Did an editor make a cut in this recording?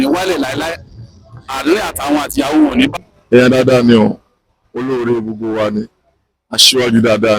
yes; 1 cut; at 3.0 s

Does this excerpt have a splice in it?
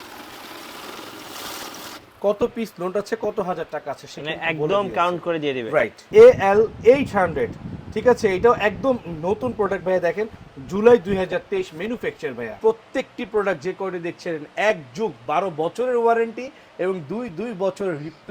yes; 2 cuts; at 6.0 s, 12.5 s

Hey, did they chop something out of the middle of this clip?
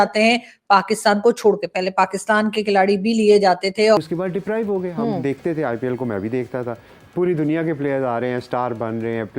yes; 1 cut; at 4.0 s

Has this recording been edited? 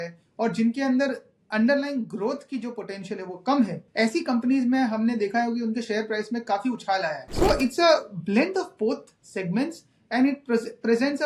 yes; 2 cuts; at 3.8 s, 7.2 s

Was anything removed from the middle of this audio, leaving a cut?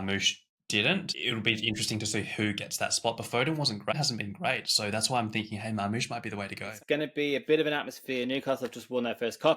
yes; 3 cuts; at 1.0 s, 4.0 s, 6.7 s

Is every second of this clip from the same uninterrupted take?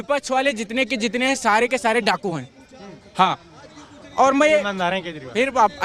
yes; 0 cuts

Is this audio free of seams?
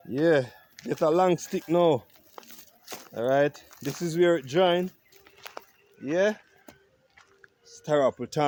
yes; 0 cuts

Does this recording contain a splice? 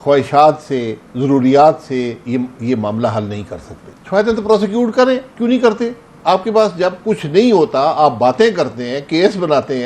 yes; 2 cuts; at 3.9 s, 6.1 s

